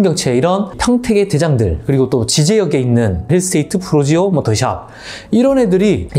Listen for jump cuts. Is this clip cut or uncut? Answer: uncut